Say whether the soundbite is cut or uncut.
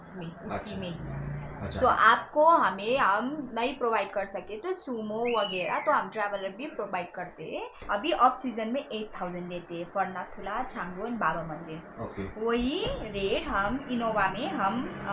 cut